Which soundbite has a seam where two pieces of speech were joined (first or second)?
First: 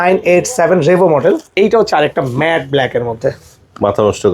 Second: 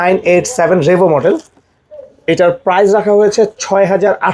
first